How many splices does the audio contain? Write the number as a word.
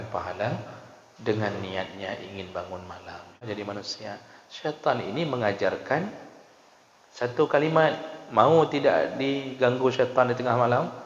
one